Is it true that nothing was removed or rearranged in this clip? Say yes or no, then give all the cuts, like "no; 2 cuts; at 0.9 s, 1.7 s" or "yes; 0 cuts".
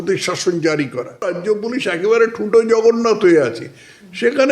no; 1 cut; at 1.3 s